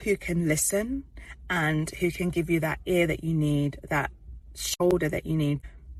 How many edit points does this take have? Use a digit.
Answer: 0